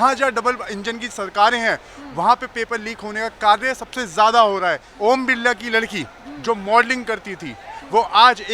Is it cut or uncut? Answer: cut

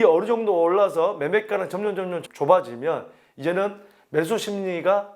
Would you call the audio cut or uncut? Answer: cut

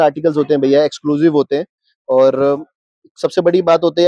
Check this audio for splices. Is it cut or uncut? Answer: uncut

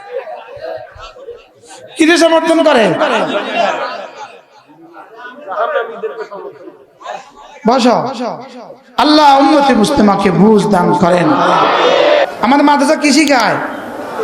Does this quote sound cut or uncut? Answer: cut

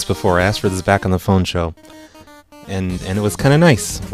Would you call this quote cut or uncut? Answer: cut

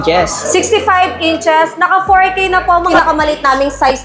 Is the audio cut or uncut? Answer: cut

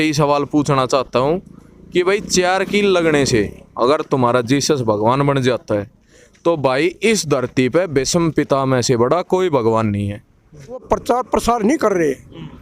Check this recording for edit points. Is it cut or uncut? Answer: cut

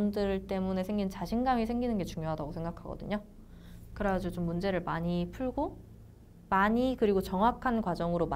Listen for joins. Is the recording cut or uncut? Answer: uncut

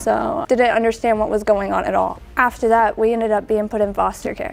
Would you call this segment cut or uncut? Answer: uncut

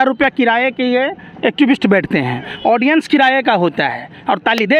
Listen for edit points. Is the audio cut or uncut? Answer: uncut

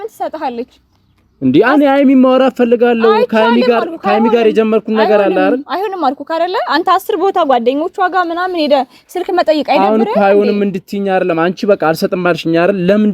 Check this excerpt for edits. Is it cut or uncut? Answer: uncut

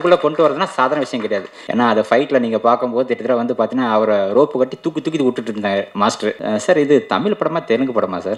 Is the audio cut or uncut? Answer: cut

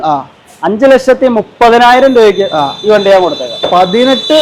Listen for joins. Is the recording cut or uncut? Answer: uncut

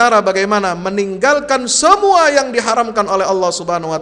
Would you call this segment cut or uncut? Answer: uncut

